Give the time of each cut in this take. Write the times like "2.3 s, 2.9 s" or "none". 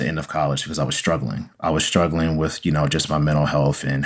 none